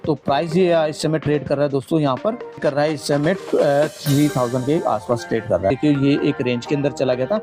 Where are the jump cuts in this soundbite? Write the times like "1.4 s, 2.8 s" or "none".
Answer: 5.7 s